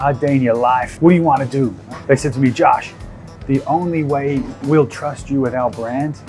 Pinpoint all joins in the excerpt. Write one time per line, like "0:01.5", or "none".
0:00.9
0:01.8